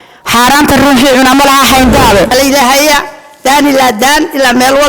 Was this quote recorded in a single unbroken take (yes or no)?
no